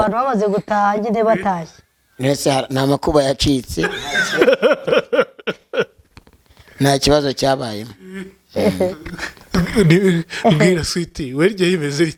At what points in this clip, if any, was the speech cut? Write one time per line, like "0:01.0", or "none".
none